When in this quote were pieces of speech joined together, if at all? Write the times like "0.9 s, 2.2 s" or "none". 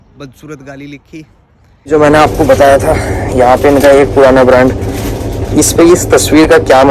1.9 s